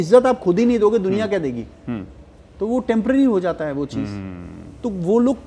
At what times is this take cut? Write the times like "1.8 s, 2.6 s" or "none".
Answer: none